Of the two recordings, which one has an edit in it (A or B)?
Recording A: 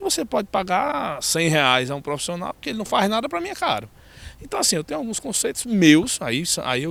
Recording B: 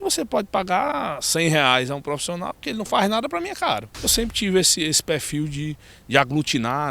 B